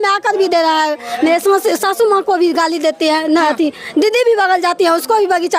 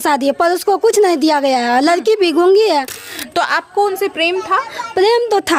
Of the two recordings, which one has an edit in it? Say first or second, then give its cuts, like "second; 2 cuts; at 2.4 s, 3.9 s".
second; 1 cut; at 3.0 s